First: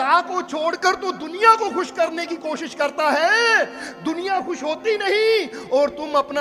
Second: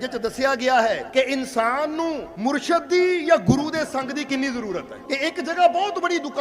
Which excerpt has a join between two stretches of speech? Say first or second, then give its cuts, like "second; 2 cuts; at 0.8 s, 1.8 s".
second; 3 cuts; at 1.0 s, 2.3 s, 4.9 s